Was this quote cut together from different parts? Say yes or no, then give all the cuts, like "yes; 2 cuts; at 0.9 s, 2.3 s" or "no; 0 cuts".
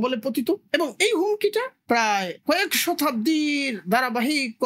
no; 0 cuts